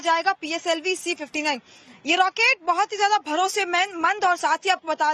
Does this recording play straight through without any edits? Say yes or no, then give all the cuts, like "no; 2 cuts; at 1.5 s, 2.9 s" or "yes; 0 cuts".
yes; 0 cuts